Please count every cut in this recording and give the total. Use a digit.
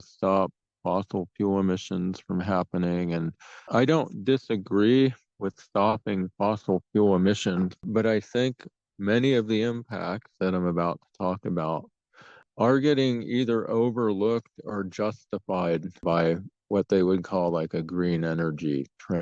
4